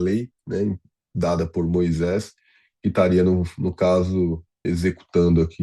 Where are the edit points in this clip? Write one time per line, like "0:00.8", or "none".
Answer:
0:04.5